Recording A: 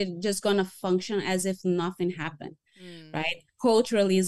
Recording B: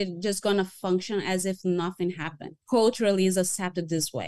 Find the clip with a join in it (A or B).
B